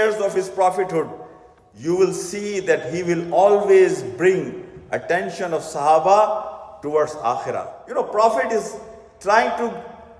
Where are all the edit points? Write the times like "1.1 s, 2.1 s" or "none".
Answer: 7.7 s